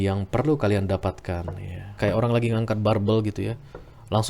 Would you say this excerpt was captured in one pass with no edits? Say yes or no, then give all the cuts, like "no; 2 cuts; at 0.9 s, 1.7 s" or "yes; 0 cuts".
no; 1 cut; at 1.9 s